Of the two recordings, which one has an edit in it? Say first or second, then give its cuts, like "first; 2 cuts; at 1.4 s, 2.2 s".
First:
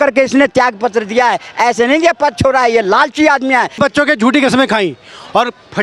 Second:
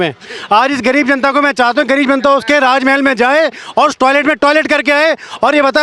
first; 1 cut; at 3.8 s